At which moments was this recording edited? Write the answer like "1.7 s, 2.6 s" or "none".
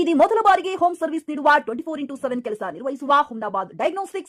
none